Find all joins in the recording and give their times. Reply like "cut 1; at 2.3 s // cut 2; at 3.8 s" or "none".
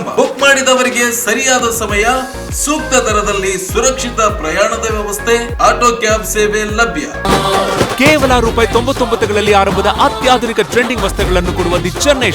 cut 1; at 7.3 s